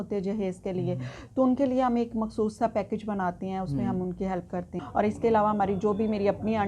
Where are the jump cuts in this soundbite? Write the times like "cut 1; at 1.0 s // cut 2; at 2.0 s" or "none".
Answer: cut 1; at 4.7 s

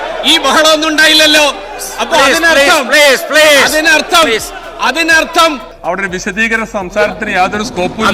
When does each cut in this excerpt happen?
cut 1; at 5.7 s

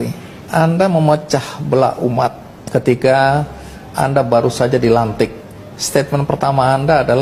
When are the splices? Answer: none

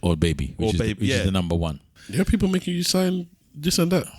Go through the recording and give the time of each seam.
cut 1; at 1.9 s

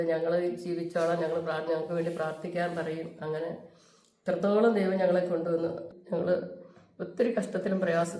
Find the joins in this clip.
cut 1; at 5.8 s

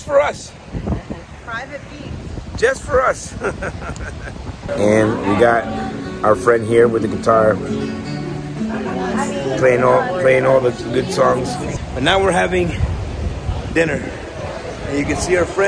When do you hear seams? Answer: cut 1; at 4.6 s // cut 2; at 11.6 s

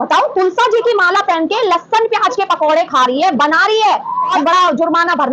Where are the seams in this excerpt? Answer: cut 1; at 4.4 s

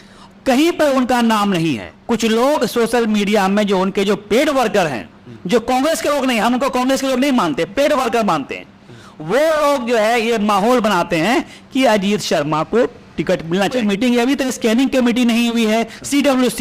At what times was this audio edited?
cut 1; at 1.9 s // cut 2; at 13.7 s

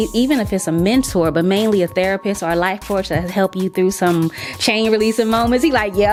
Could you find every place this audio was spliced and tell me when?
none

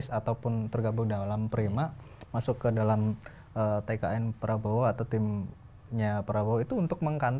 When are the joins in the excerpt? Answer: none

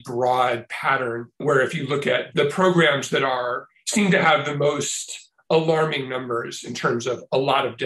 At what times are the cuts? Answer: cut 1; at 2.3 s

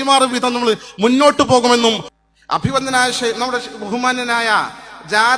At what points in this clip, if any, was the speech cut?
cut 1; at 2.1 s

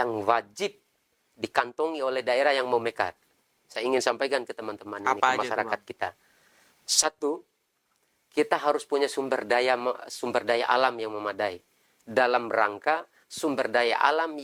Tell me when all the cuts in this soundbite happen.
none

